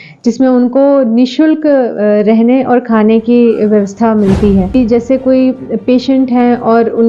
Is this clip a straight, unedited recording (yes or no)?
no